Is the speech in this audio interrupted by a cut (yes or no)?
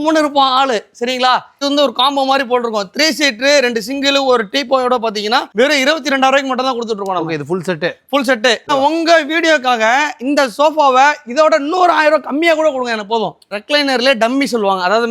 yes